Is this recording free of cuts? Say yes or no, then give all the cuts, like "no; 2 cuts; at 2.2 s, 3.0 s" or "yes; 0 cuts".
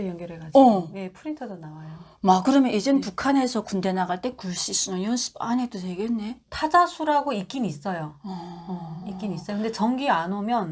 yes; 0 cuts